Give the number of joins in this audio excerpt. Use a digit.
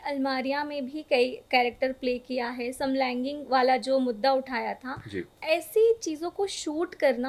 1